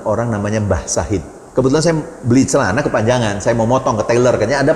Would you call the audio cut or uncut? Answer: cut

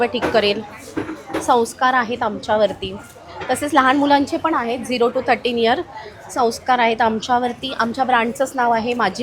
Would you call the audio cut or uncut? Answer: uncut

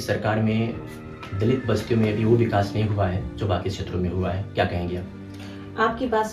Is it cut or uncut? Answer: uncut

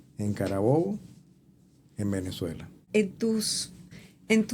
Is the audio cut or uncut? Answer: cut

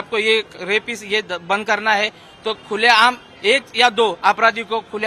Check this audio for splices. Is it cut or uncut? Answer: uncut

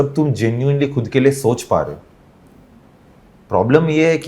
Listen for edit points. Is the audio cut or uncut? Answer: uncut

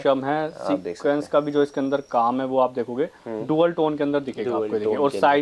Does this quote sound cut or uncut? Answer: uncut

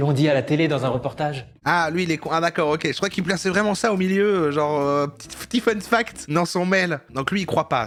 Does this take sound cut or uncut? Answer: uncut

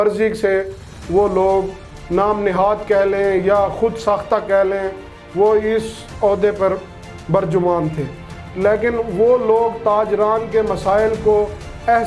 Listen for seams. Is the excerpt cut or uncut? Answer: uncut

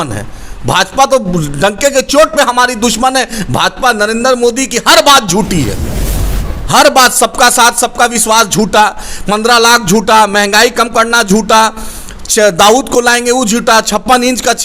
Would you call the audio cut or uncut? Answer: uncut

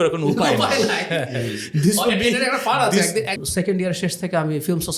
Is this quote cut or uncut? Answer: cut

